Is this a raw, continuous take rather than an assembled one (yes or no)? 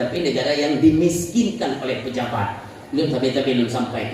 yes